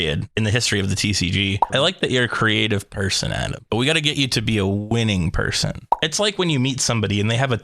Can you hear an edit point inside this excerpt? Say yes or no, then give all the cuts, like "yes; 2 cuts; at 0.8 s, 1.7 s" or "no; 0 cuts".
yes; 2 cuts; at 1.6 s, 5.8 s